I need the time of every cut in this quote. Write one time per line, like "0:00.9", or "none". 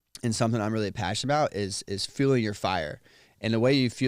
none